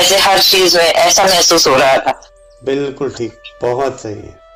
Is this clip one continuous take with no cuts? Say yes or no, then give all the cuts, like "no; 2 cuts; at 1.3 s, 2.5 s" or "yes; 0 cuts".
yes; 0 cuts